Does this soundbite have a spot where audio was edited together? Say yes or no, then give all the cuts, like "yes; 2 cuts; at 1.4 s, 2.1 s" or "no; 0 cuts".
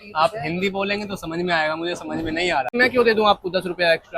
yes; 1 cut; at 2.7 s